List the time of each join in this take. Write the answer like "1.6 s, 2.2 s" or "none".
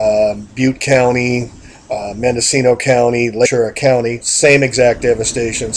none